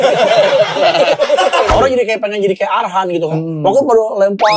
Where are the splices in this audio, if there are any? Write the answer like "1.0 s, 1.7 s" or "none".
1.7 s